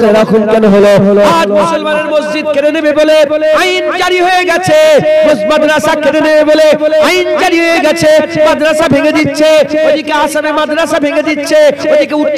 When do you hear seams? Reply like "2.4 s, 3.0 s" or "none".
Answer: none